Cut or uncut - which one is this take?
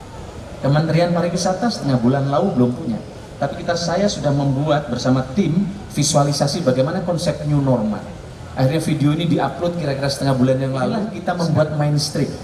cut